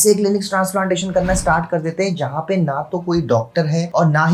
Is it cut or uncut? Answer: uncut